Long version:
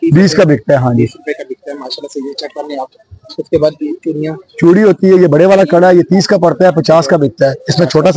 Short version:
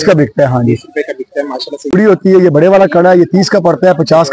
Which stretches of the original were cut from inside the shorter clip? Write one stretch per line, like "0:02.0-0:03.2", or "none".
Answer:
0:02.2-0:04.7